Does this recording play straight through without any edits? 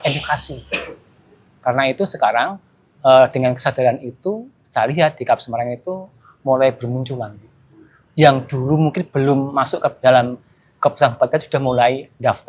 yes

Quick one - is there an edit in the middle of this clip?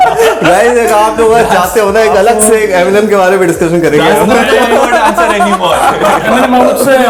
no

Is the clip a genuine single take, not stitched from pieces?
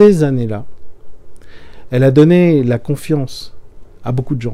yes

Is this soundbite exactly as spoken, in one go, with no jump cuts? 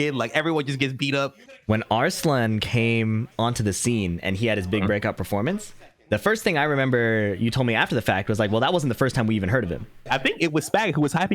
no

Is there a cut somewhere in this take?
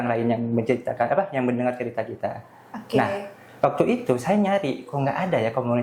no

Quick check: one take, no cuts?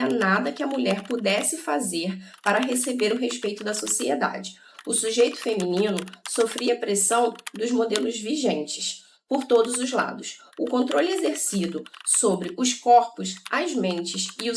yes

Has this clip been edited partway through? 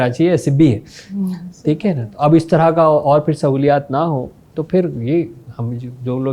no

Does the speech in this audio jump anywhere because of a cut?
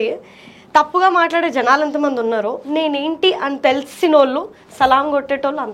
no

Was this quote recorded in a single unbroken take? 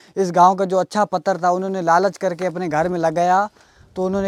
yes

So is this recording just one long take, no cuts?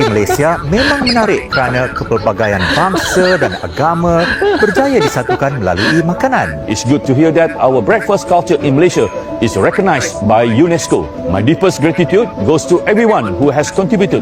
yes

